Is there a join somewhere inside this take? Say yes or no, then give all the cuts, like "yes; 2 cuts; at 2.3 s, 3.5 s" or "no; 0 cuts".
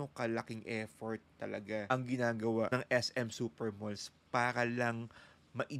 yes; 2 cuts; at 1.9 s, 2.7 s